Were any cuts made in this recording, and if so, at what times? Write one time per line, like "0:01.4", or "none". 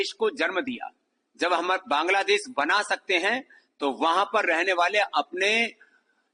none